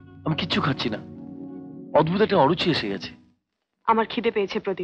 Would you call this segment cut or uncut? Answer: uncut